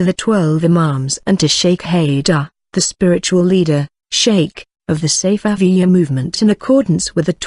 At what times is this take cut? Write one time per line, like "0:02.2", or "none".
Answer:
0:05.5